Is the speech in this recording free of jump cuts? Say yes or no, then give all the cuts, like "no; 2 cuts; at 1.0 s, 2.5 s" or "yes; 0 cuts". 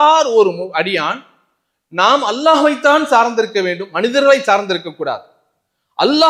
yes; 0 cuts